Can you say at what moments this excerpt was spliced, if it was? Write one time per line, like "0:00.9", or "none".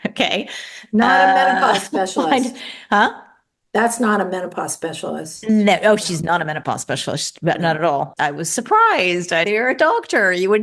0:08.2
0:09.4